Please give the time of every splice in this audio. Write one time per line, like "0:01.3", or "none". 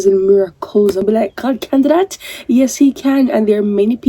0:01.0

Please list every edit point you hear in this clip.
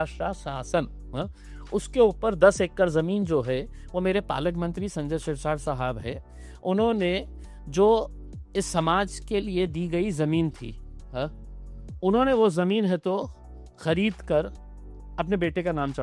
none

